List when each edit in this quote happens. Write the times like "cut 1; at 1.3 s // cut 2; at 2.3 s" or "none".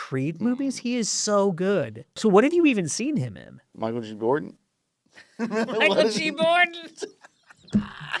cut 1; at 2.2 s // cut 2; at 3.7 s